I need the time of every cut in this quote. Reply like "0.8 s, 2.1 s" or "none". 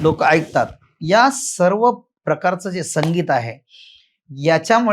2.1 s